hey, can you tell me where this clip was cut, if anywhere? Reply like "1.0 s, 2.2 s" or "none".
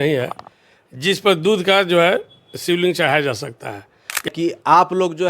4.3 s